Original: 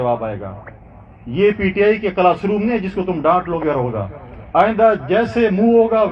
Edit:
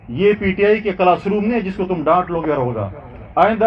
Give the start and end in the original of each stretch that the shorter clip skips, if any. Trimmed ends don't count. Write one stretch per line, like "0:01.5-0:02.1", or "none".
none